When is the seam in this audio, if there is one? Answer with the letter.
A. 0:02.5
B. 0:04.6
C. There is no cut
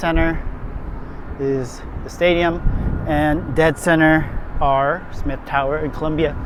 C